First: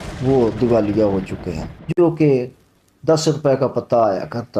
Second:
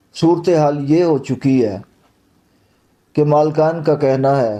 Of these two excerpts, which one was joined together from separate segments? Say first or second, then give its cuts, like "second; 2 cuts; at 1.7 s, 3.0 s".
first; 1 cut; at 2.0 s